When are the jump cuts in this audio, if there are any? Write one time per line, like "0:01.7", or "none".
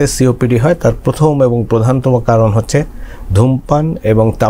none